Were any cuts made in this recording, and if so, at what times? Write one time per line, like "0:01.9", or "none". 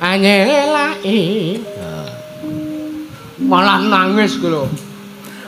none